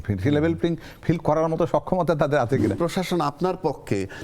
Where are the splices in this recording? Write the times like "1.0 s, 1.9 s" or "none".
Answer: 2.8 s